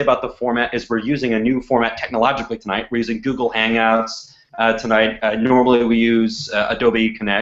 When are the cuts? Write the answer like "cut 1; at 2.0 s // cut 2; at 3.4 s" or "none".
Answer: cut 1; at 5.6 s